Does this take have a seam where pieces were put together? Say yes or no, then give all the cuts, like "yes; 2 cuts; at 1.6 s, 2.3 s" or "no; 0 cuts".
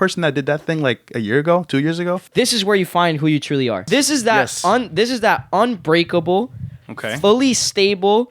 yes; 2 cuts; at 2.2 s, 3.8 s